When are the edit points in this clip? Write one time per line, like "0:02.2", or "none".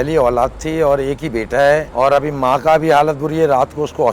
0:01.9